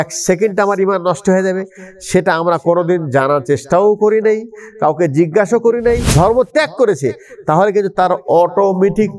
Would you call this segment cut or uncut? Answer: cut